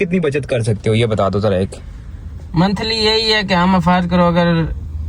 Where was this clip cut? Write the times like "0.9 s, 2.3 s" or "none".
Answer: none